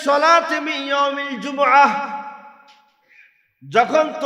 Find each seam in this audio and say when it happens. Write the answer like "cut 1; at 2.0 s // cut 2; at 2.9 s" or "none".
none